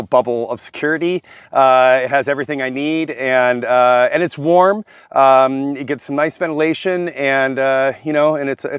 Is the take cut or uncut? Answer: uncut